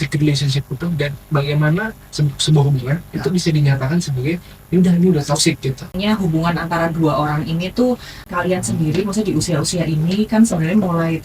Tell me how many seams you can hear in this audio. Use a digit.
2